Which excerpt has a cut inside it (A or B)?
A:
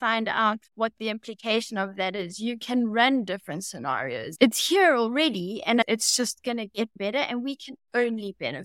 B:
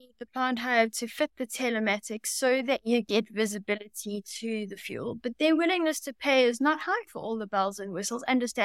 A